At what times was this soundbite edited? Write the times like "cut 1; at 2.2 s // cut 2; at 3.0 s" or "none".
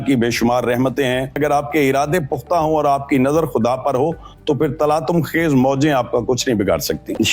cut 1; at 1.4 s